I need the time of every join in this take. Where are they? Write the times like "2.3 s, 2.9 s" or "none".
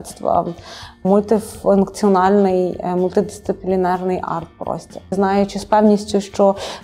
1.0 s, 5.1 s

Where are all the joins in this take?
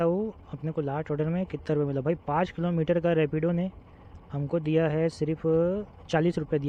none

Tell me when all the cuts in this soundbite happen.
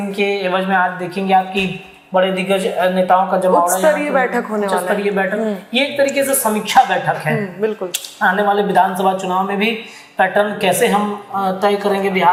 none

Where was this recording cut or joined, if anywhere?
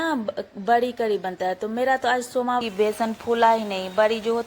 2.6 s

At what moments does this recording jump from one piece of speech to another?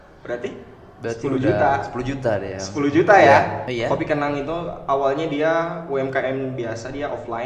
3.6 s

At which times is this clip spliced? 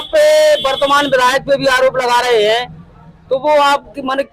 none

